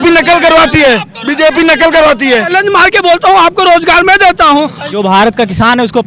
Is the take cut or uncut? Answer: cut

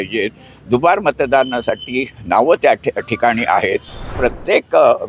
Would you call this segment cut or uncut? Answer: cut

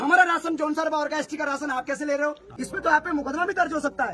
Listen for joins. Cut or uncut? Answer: cut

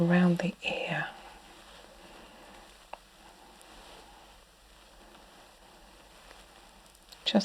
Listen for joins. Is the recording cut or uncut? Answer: cut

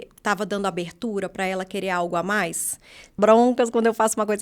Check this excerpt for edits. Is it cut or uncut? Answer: cut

